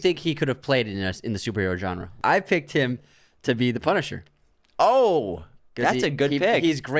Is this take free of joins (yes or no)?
no